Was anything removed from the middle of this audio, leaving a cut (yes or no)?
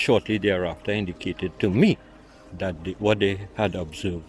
no